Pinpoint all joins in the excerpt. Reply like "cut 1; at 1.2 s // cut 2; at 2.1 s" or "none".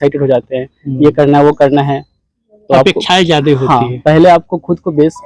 none